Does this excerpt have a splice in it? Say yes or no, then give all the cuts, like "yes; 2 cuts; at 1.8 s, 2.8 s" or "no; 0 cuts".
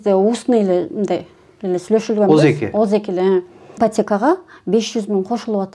yes; 1 cut; at 3.8 s